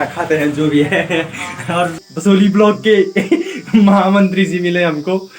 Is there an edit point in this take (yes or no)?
yes